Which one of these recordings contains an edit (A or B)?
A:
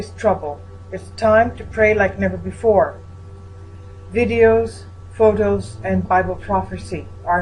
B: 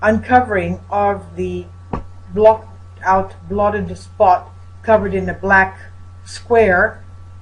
A